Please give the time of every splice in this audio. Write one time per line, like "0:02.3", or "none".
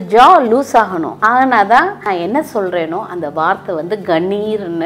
0:01.1
0:02.0